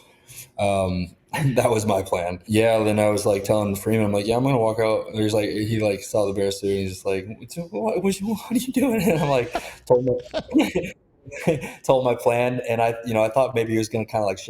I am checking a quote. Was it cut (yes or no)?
yes